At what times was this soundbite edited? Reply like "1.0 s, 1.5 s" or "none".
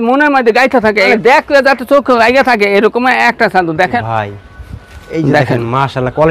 1.1 s, 4.0 s